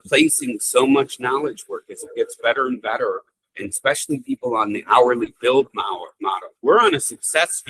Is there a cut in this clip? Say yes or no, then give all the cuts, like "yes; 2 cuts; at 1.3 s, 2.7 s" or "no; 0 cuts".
no; 0 cuts